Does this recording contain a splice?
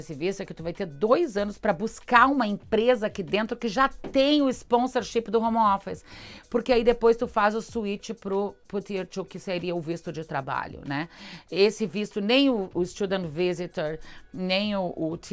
no; 0 cuts

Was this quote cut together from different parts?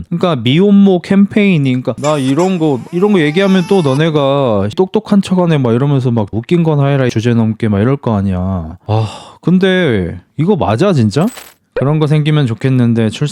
yes; 4 cuts; at 4.7 s, 6.4 s, 7.1 s, 11.3 s

